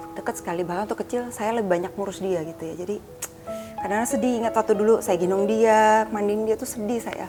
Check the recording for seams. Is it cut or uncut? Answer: uncut